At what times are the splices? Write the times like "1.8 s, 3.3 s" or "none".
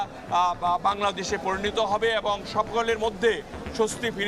none

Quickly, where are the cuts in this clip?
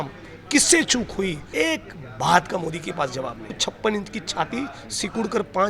1.4 s, 3.6 s

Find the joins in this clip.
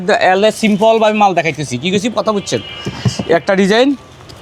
none

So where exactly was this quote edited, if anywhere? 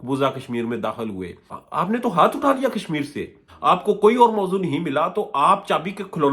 1.5 s, 3.4 s

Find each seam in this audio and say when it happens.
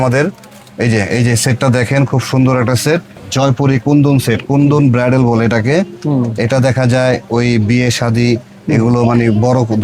3.1 s

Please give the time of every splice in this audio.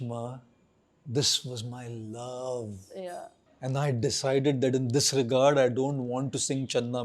3.4 s

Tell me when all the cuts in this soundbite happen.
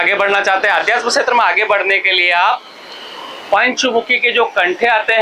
none

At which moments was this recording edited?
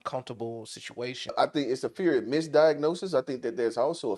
1.3 s

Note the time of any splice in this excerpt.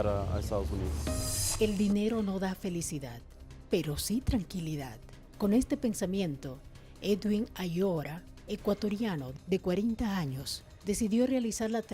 1.2 s

